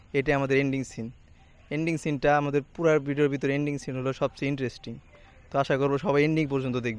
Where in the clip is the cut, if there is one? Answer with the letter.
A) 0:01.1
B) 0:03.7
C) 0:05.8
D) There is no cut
D